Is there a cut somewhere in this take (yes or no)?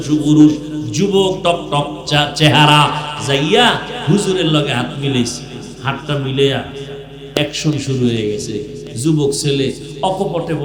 no